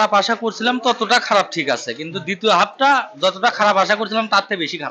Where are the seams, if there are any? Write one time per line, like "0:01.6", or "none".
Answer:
none